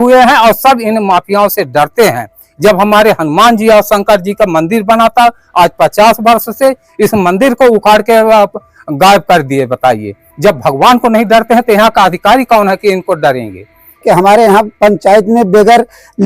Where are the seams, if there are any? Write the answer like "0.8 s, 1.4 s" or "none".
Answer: 14.0 s